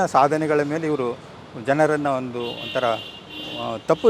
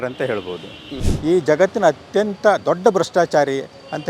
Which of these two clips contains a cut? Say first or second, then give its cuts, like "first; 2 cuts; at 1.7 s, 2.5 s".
second; 1 cut; at 1.1 s